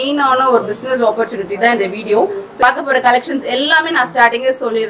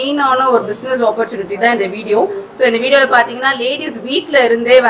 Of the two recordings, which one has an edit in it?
first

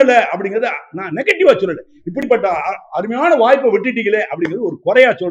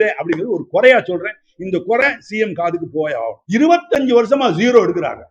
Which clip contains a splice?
second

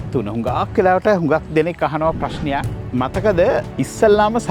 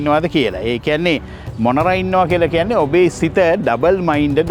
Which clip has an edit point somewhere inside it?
first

